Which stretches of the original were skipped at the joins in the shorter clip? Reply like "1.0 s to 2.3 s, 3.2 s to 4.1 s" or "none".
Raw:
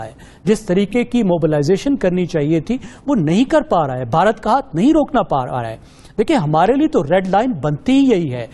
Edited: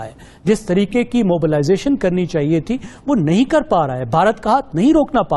none